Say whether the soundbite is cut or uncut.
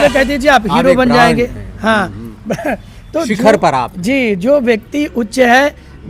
uncut